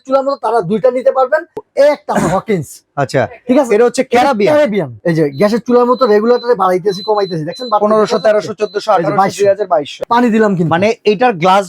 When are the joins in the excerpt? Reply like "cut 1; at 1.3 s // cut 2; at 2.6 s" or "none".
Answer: cut 1; at 1.6 s // cut 2; at 5.0 s // cut 3; at 9.9 s